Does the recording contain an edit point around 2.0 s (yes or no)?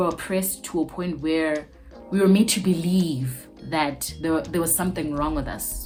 no